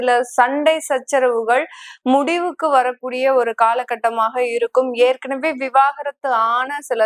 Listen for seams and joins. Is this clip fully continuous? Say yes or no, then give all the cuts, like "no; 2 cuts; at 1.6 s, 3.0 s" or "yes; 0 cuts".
yes; 0 cuts